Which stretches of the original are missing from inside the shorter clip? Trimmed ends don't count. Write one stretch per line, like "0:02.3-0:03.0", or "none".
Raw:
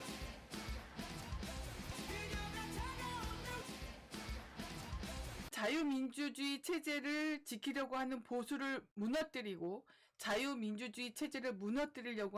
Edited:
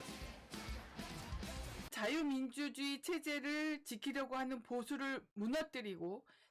0:01.8-0:05.4